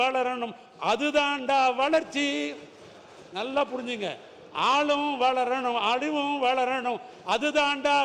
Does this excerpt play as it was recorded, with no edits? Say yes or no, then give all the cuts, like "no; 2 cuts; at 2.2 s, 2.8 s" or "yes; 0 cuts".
yes; 0 cuts